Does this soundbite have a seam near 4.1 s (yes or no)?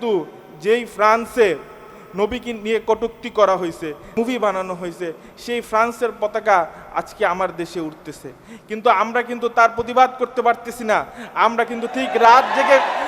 yes